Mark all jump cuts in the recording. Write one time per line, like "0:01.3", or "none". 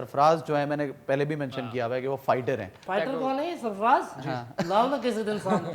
0:02.8